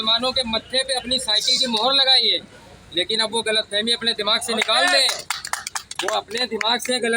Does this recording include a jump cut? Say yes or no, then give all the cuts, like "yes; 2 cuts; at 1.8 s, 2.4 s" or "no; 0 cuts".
no; 0 cuts